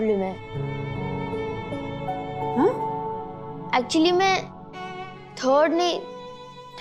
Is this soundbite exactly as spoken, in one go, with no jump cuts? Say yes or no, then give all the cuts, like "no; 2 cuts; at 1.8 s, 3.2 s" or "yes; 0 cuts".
yes; 0 cuts